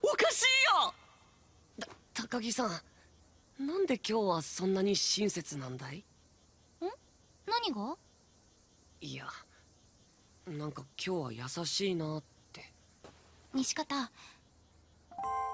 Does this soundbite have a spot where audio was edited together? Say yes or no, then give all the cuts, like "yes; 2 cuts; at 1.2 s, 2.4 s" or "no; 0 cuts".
no; 0 cuts